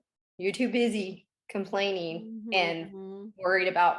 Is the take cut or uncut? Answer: uncut